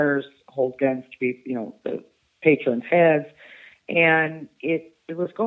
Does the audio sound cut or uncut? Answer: uncut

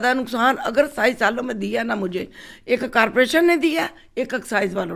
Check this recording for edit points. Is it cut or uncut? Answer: uncut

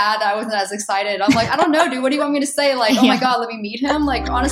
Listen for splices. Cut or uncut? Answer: uncut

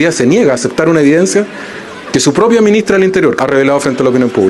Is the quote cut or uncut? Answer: cut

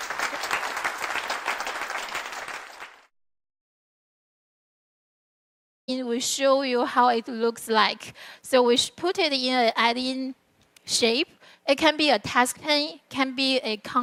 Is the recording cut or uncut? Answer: uncut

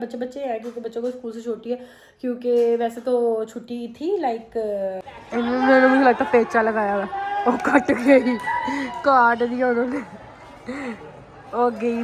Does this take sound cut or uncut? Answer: cut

